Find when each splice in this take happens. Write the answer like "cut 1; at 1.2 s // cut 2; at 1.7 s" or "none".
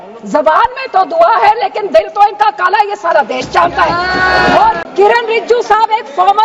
cut 1; at 4.8 s